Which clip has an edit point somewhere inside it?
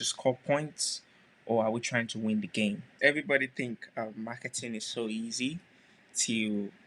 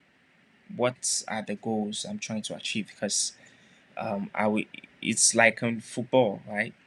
first; 1 cut; at 2.9 s

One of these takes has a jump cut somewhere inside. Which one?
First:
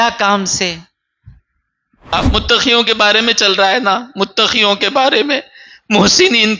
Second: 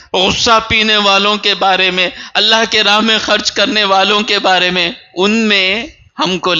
first; 1 cut; at 2.1 s

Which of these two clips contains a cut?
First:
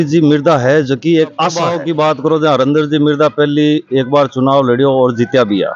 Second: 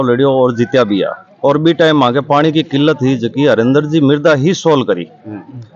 first; 1 cut; at 1.7 s

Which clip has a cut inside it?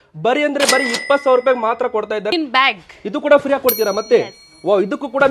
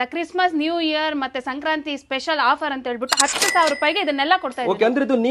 first; 1 cut; at 2.3 s

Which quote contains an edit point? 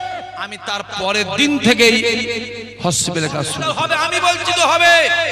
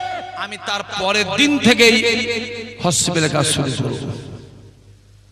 first; 1 cut; at 3.6 s

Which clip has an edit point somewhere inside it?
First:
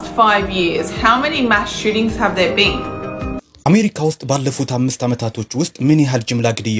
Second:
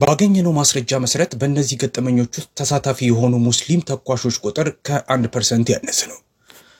first; 1 cut; at 3.4 s

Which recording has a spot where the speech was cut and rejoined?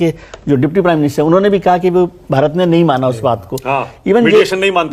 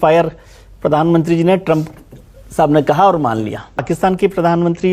second; 1 cut; at 3.8 s

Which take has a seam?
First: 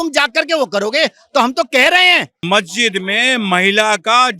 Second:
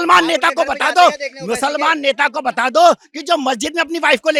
first; 1 cut; at 2.3 s

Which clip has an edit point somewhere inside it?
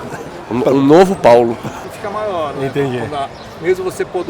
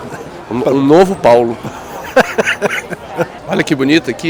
first; 1 cut; at 1.9 s

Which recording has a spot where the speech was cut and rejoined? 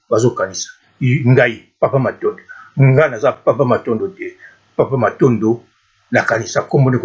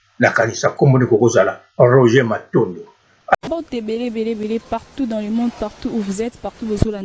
second; 1 cut; at 3.3 s

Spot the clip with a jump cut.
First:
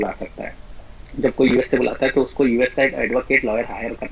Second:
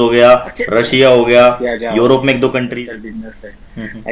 second; 1 cut; at 2.7 s

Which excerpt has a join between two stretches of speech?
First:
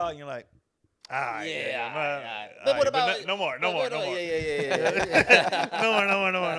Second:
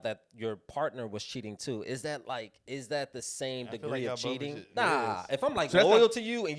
second; 1 cut; at 4.7 s

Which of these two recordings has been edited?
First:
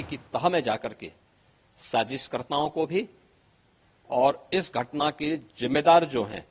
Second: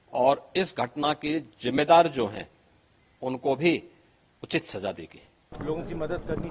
second; 1 cut; at 5.5 s

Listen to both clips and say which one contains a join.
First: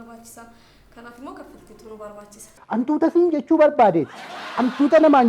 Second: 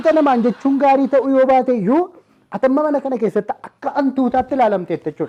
first; 1 cut; at 2.6 s

